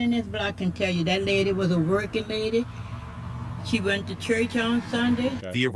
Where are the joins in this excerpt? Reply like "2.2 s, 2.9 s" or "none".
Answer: 4.6 s